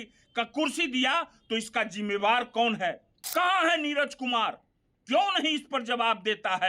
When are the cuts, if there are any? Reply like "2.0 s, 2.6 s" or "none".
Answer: 3.1 s